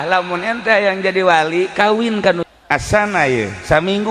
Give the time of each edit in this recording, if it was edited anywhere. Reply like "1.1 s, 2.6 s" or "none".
2.4 s